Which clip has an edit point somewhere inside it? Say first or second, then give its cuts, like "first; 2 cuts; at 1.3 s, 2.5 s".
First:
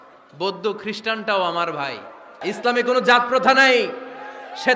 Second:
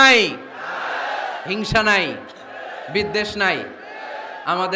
first; 1 cut; at 2.4 s